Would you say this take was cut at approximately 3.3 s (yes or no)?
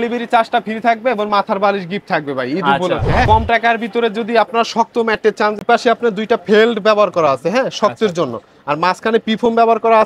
yes